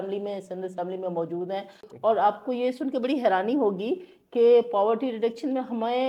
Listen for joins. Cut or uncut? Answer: cut